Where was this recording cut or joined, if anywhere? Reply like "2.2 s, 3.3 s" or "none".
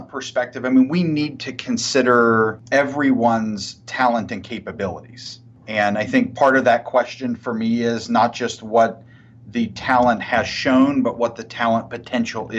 2.6 s